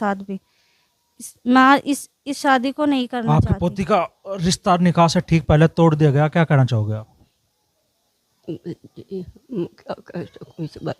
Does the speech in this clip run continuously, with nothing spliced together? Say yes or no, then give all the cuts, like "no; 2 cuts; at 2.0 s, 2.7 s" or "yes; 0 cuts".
no; 1 cut; at 3.2 s